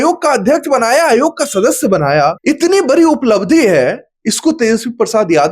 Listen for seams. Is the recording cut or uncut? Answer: uncut